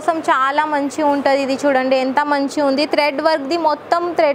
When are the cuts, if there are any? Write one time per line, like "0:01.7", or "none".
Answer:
none